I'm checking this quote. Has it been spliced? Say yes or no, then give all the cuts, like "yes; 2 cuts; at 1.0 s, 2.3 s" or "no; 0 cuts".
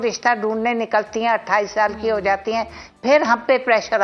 no; 0 cuts